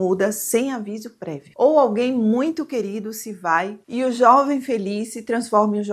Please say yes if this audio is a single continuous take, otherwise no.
no